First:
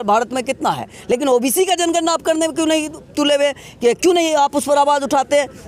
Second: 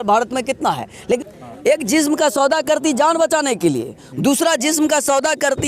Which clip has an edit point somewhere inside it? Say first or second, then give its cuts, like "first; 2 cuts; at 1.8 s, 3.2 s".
second; 1 cut; at 1.2 s